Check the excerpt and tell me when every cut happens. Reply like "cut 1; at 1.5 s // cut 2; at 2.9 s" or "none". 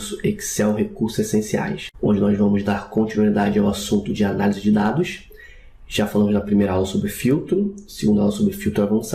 cut 1; at 7.4 s